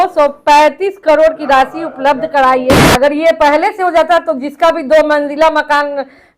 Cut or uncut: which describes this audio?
cut